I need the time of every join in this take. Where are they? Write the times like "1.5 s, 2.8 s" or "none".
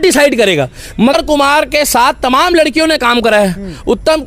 1.1 s

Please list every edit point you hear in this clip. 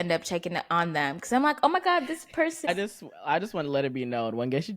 2.7 s

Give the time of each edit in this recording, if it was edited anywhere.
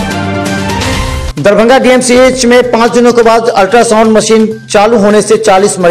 1.2 s

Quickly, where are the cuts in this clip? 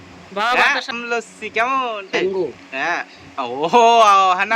1.0 s, 2.2 s

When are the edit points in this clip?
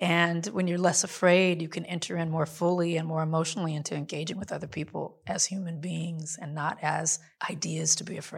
7.2 s

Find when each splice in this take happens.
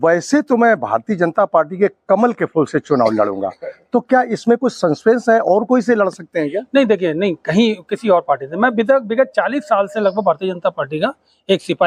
none

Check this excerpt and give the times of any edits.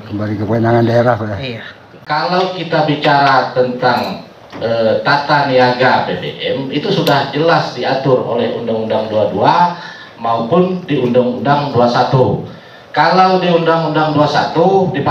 2.0 s

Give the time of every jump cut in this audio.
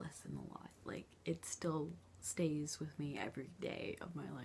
none

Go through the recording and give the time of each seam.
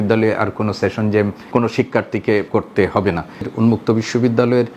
1.4 s, 2.5 s, 3.5 s

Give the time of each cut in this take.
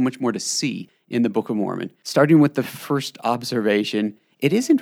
0.9 s

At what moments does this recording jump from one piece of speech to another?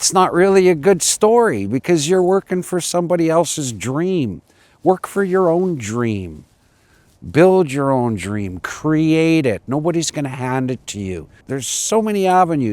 11.5 s

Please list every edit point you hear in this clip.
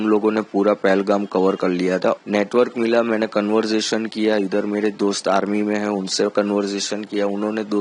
2.2 s

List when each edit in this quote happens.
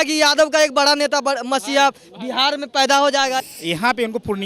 3.4 s

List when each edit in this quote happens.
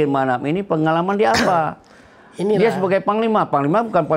none

